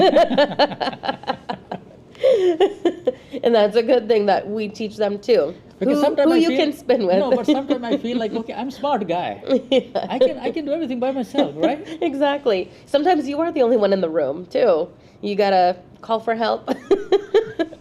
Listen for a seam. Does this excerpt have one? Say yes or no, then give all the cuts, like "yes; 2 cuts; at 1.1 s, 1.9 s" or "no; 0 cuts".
no; 0 cuts